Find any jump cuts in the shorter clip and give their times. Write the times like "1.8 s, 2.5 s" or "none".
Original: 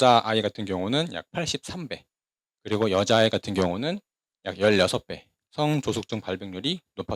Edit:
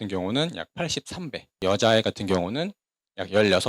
1.6 s